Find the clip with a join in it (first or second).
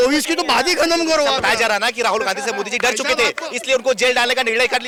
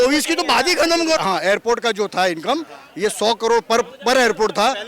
second